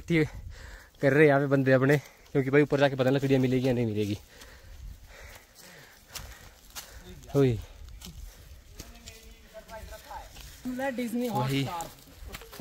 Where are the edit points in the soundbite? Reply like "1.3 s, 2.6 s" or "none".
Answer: none